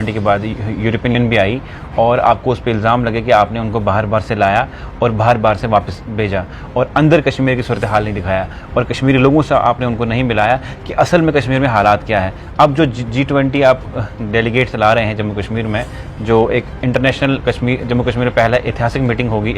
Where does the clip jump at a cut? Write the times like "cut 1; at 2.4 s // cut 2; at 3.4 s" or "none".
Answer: cut 1; at 1.1 s